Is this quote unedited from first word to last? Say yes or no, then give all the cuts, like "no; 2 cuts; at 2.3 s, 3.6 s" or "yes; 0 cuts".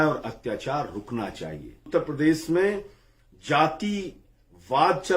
no; 1 cut; at 1.9 s